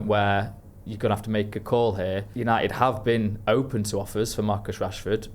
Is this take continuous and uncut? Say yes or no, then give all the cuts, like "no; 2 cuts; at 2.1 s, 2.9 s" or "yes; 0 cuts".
no; 1 cut; at 2.3 s